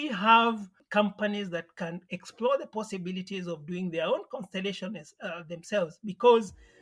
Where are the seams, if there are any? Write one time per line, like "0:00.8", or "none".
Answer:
none